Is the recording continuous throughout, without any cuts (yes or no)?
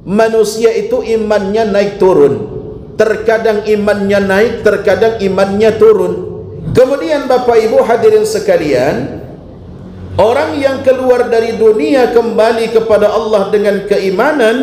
no